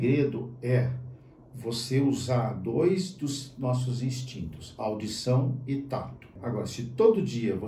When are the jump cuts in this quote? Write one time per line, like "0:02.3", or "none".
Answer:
0:06.4